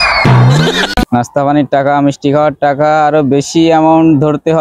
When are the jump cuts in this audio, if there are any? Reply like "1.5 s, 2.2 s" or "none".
1.0 s

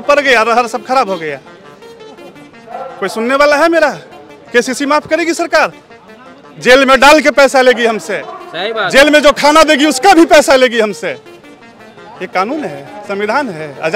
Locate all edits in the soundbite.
none

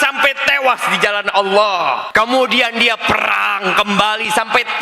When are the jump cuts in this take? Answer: 2.1 s

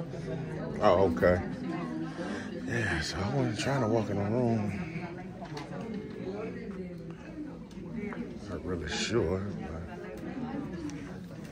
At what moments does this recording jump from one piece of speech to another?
none

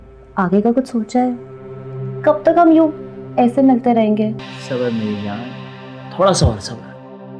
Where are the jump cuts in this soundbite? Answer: 4.5 s

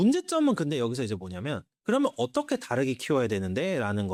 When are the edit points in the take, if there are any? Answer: none

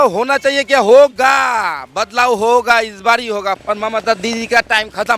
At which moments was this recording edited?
3.6 s

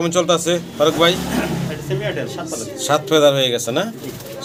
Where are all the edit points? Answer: none

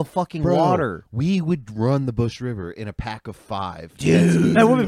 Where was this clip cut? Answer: none

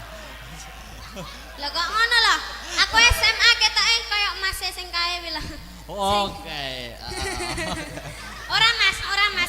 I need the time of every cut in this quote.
none

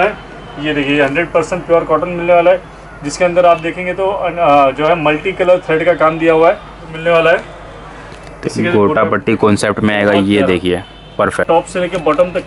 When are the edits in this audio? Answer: 6.9 s, 11.4 s

